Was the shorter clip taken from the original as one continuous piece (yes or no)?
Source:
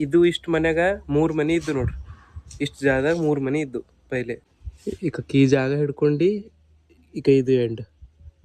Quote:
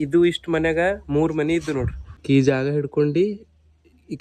no